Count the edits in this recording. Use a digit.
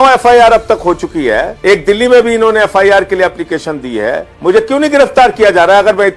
2